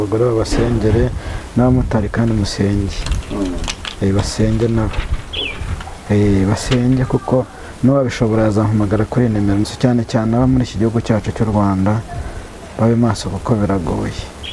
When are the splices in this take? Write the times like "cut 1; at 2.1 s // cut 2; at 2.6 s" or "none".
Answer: cut 1; at 9.6 s